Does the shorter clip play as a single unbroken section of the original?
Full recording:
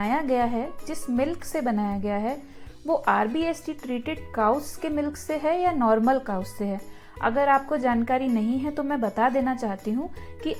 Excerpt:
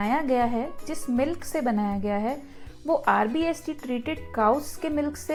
yes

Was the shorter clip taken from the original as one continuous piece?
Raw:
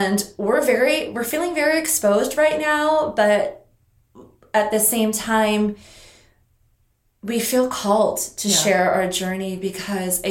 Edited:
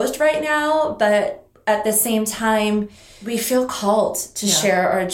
no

